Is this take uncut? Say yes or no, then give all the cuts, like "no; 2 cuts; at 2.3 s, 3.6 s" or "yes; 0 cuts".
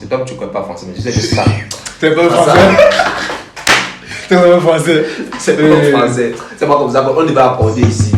yes; 0 cuts